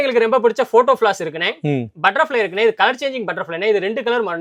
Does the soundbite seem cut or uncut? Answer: uncut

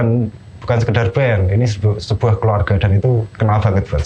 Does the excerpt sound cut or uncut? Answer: uncut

